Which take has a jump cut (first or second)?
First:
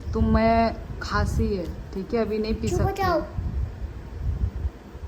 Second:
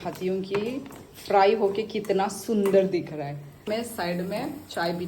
second